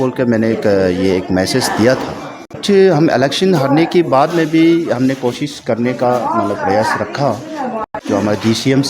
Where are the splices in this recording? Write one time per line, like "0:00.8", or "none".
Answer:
0:02.6
0:07.9